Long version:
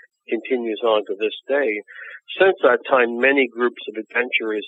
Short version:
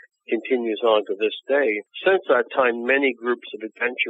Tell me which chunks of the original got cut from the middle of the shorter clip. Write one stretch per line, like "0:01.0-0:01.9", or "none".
0:01.9-0:02.2